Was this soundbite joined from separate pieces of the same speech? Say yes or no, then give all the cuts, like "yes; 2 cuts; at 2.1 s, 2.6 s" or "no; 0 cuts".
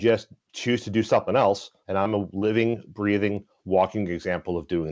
no; 0 cuts